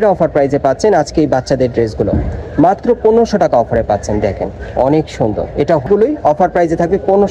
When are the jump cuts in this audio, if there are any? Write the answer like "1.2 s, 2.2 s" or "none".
5.8 s